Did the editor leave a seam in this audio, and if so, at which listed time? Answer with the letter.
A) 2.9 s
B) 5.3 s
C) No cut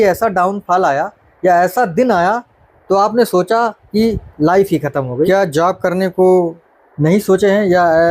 B